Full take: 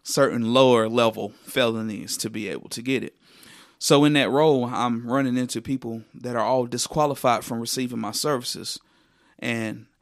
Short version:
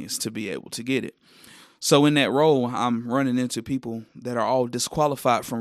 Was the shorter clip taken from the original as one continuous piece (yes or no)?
yes